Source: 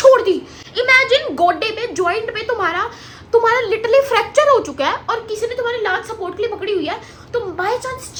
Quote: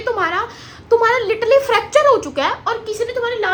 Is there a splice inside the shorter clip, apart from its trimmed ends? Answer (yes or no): no